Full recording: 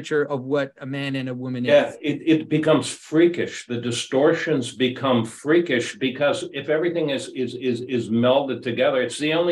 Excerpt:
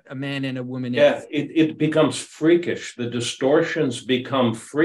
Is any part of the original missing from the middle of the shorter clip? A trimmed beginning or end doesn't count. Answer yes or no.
no